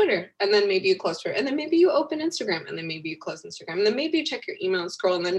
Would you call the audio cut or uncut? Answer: uncut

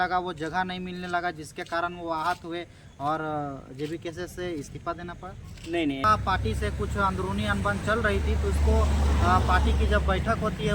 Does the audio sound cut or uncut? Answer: cut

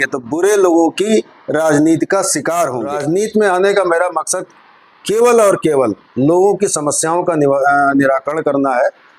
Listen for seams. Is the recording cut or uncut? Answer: cut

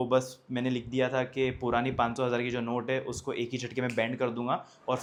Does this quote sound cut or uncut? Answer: uncut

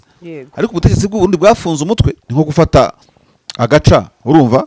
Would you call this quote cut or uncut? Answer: cut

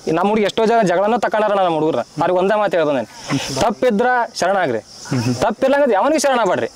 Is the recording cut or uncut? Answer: uncut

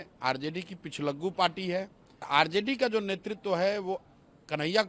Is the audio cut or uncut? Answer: cut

